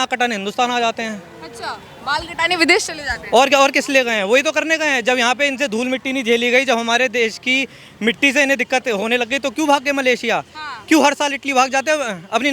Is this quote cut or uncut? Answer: uncut